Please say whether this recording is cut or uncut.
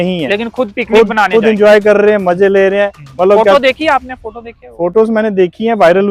uncut